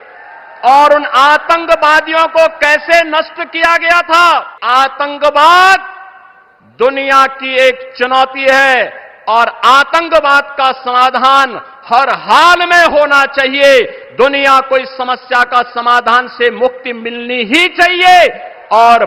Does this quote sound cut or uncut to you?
cut